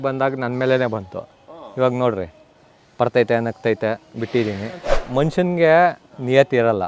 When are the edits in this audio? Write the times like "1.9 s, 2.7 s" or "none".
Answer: 4.9 s